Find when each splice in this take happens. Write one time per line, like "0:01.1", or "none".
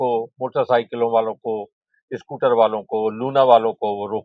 none